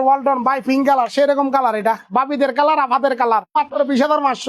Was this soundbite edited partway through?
yes; 1 cut; at 3.5 s

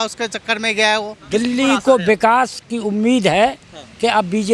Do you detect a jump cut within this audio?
yes; 1 cut; at 1.2 s

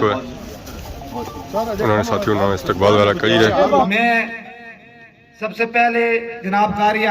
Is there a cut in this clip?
yes; 1 cut; at 3.9 s

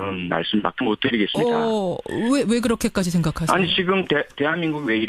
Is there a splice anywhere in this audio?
yes; 1 cut; at 1.6 s

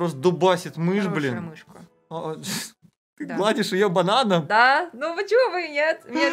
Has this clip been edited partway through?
no; 0 cuts

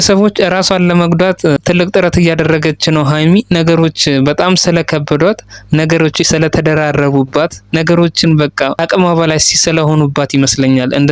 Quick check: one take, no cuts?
no; 2 cuts; at 7.6 s, 8.8 s

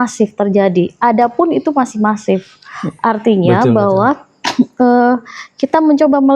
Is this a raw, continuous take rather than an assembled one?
yes; 0 cuts

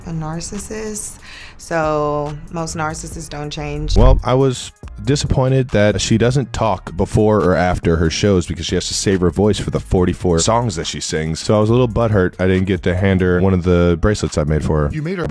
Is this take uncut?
no; 1 cut; at 3.9 s

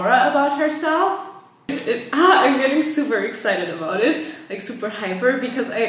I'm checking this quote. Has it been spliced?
yes; 1 cut; at 1.8 s

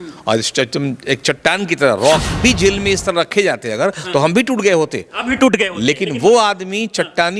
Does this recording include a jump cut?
yes; 1 cut; at 2.4 s

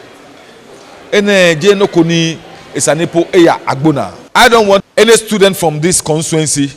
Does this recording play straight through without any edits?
no; 1 cut; at 4.2 s

